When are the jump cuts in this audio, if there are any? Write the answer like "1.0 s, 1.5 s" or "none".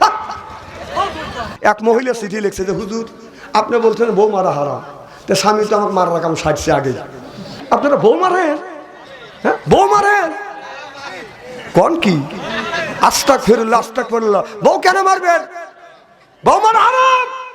1.4 s, 7.6 s